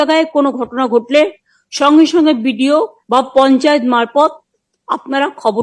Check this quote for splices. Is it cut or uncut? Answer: cut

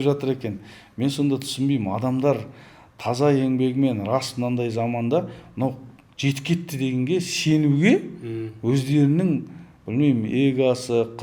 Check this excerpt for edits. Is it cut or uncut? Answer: uncut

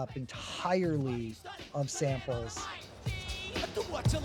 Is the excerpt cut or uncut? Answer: cut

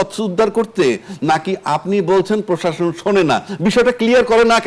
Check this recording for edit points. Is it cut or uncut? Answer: uncut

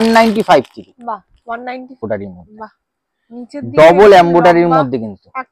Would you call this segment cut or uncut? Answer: cut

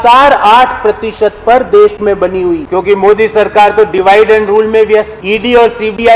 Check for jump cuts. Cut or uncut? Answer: cut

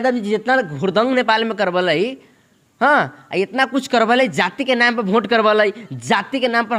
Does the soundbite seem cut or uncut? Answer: uncut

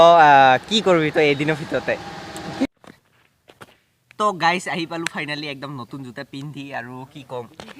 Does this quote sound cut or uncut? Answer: cut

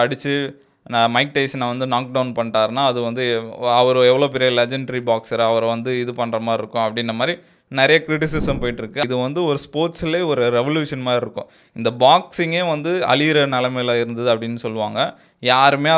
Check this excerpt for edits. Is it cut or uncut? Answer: cut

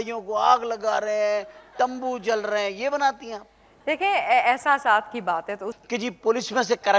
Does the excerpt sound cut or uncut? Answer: cut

